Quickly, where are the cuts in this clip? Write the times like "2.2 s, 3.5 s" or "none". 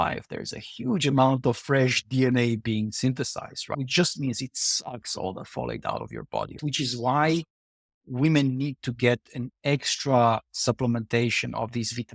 3.7 s, 6.6 s